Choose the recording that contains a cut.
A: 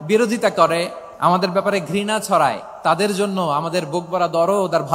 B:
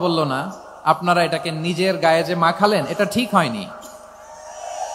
A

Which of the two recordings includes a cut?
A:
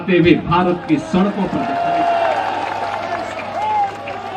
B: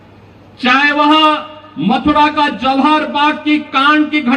A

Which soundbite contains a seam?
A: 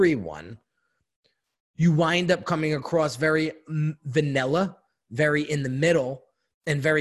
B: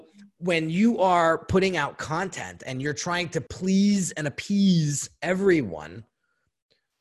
B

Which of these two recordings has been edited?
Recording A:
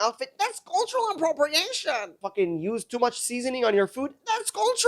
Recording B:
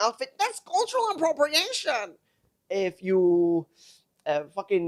A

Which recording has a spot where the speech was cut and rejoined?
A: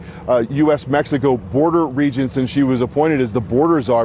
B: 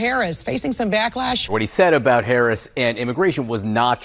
B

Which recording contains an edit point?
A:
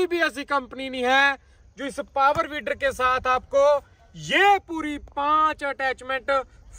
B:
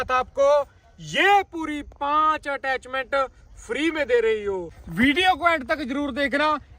B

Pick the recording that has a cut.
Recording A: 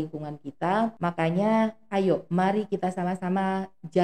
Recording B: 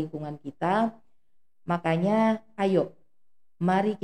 A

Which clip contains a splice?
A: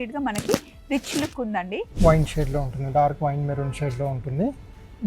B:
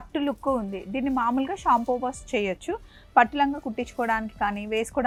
A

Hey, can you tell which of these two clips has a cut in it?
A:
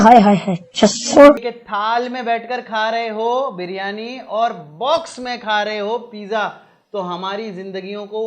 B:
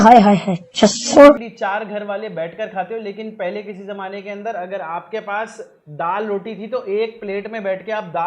A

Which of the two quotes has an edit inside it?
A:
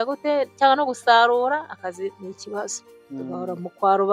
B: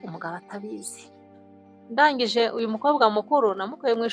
B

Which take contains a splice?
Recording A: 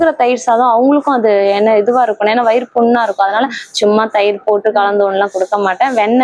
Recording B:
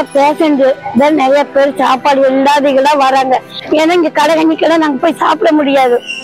B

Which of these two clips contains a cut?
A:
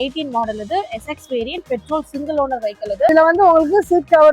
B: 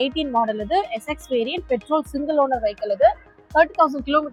A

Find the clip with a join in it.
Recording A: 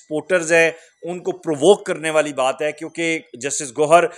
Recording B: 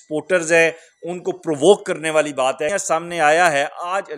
B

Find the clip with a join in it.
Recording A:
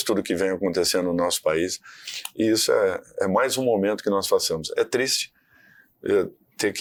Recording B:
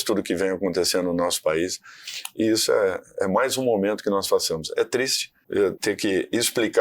B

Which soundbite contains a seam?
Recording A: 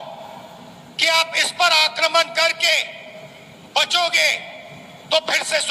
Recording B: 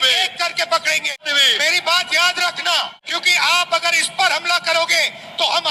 B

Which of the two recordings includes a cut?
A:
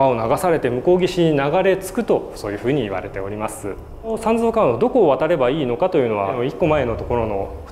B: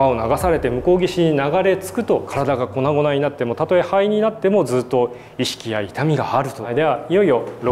B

